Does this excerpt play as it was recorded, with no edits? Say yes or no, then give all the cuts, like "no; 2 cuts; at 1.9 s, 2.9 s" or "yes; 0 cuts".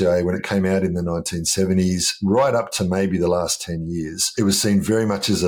no; 1 cut; at 4.3 s